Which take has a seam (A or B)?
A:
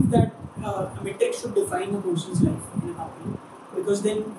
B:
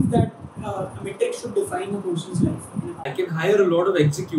B